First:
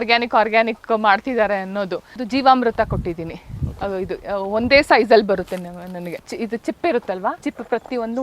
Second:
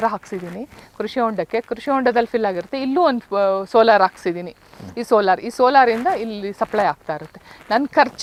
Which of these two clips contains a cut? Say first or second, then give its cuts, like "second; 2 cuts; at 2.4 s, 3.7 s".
first; 3 cuts; at 2.2 s, 6.3 s, 7.4 s